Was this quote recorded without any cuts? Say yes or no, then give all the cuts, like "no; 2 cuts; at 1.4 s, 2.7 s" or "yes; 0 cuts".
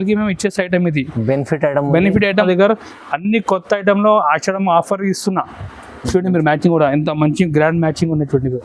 no; 1 cut; at 2.4 s